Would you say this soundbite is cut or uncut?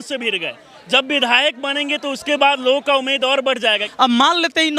cut